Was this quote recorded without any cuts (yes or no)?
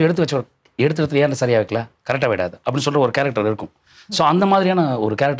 yes